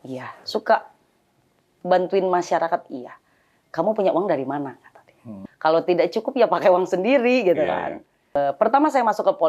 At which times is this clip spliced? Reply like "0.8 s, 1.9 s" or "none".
5.3 s, 8.4 s

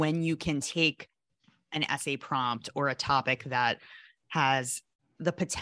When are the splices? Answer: none

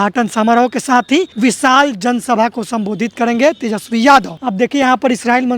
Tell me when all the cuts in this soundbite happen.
1.3 s, 4.4 s

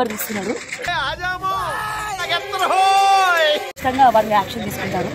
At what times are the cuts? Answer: none

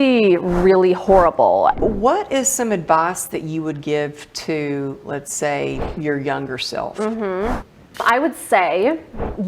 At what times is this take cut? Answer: 1.8 s, 8.0 s

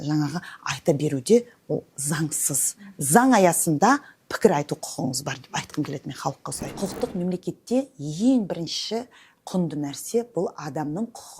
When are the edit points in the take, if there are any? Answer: 6.6 s

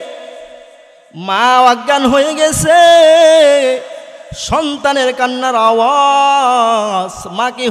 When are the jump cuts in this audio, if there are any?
none

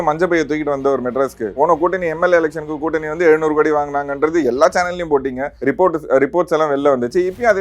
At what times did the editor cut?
1.5 s, 5.5 s

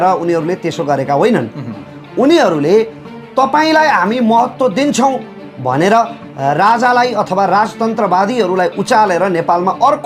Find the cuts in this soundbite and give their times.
none

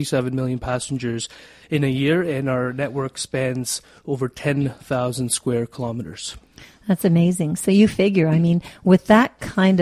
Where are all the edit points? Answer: none

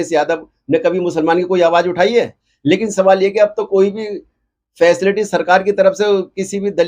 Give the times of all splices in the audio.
2.4 s

